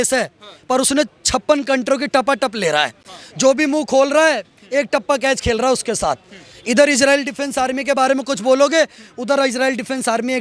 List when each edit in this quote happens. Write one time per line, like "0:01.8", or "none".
none